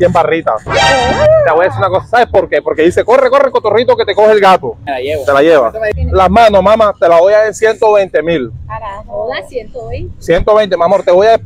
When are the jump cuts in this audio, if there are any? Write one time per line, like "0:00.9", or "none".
0:05.8